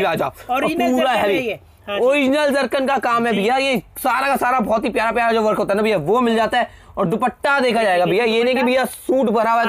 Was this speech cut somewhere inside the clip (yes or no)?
no